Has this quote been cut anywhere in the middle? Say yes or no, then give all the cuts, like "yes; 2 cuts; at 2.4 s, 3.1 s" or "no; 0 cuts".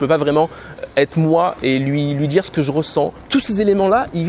yes; 1 cut; at 3.1 s